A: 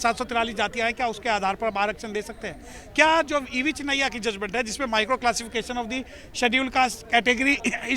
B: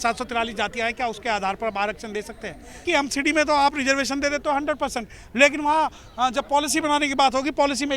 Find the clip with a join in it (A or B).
B